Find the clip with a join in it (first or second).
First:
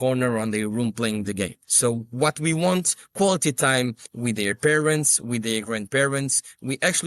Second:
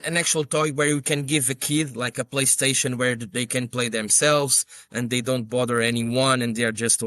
first